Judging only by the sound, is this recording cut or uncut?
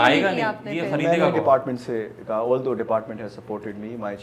uncut